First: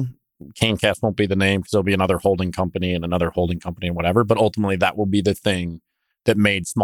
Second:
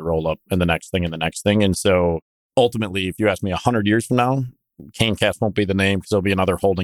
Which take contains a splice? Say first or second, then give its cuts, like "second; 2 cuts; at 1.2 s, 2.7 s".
second; 1 cut; at 2.3 s